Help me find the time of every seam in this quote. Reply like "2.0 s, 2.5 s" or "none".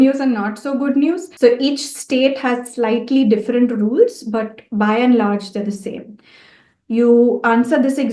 1.3 s